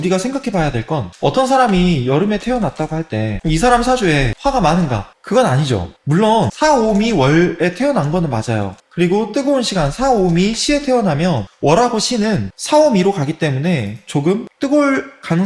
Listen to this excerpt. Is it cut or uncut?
cut